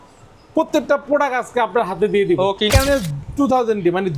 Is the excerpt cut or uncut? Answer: cut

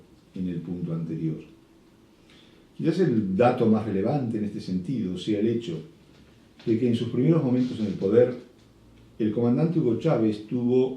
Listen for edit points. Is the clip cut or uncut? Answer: cut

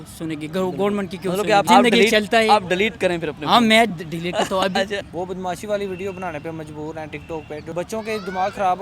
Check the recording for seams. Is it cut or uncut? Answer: cut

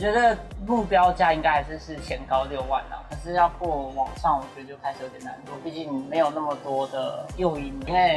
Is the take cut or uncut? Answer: uncut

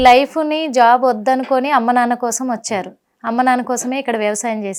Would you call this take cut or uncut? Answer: uncut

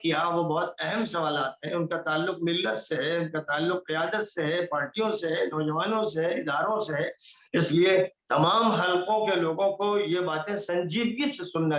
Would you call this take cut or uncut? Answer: uncut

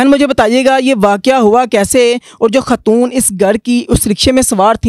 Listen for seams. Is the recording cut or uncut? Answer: uncut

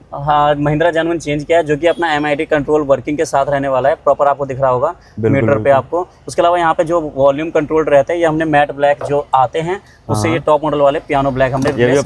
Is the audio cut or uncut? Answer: uncut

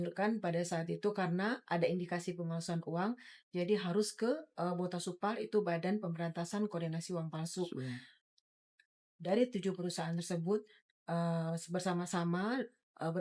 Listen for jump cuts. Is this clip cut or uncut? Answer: uncut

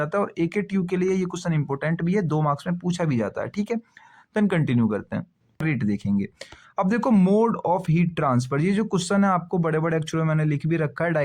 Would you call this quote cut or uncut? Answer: cut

